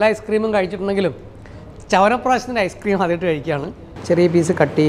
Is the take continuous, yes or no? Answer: no